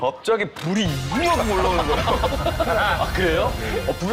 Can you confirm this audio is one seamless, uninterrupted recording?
yes; 0 cuts

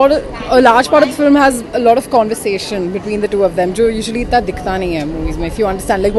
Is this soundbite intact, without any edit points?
yes; 0 cuts

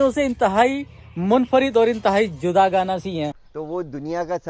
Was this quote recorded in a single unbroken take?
no; 1 cut; at 3.4 s

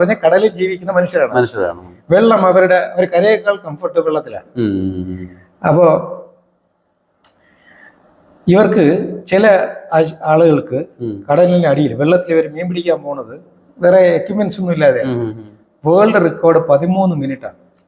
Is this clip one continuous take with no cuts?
yes; 0 cuts

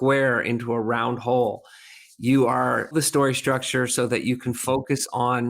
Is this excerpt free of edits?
no; 1 cut; at 2.9 s

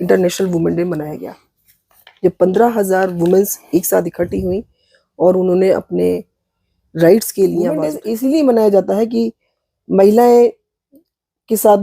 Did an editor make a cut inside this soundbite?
yes; 1 cut; at 8.0 s

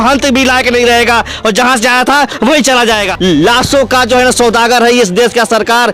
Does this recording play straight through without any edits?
no; 1 cut; at 3.1 s

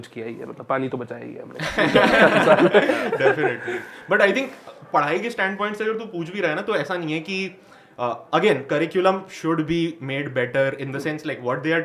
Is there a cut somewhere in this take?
no; 0 cuts

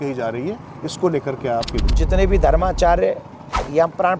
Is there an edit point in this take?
yes; 1 cut; at 1.9 s

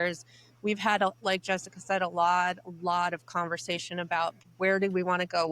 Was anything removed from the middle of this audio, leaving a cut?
yes; 1 cut; at 4.4 s

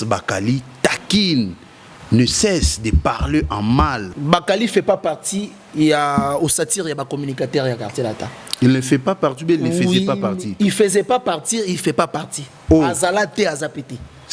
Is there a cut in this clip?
yes; 1 cut; at 4.1 s

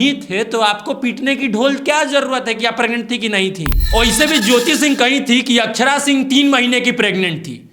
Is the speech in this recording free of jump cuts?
no; 1 cut; at 3.7 s

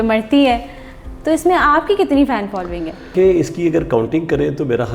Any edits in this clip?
yes; 1 cut; at 3.1 s

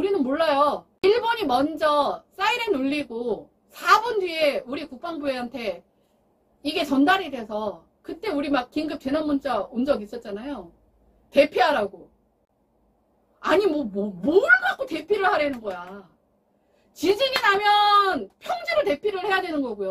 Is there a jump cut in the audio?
yes; 1 cut; at 1.0 s

